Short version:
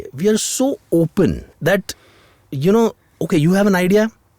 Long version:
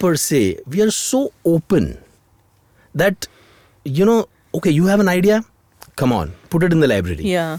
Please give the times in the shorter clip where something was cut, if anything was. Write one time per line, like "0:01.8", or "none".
0:01.5